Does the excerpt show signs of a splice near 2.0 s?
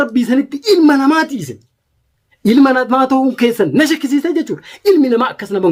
no; 0 cuts

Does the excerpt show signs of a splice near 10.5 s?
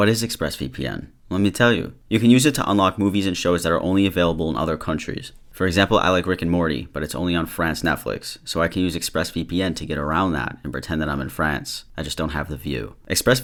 no; 0 cuts

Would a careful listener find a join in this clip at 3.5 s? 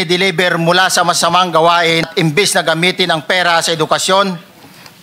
no; 1 cut; at 2.1 s

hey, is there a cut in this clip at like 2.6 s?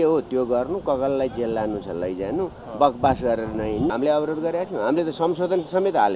no; 1 cut; at 3.9 s

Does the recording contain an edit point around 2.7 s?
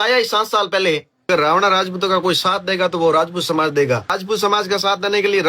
no; 2 cuts; at 1.3 s, 4.2 s

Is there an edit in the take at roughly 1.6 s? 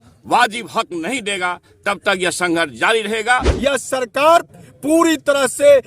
no; 1 cut; at 3.5 s

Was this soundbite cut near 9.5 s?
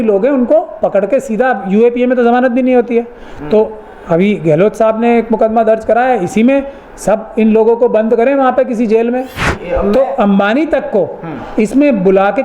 yes; 1 cut; at 9.5 s

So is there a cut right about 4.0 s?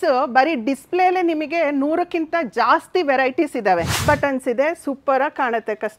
yes; 1 cut; at 4.0 s

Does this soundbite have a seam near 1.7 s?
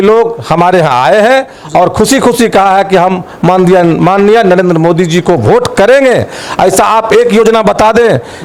no; 0 cuts

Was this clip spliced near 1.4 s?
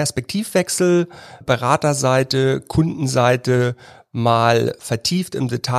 yes; 2 cuts; at 1.4 s, 4.8 s

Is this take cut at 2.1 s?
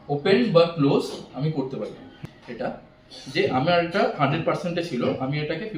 yes; 1 cut; at 2.1 s

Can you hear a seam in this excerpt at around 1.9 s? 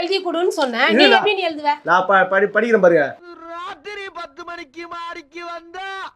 no; 0 cuts

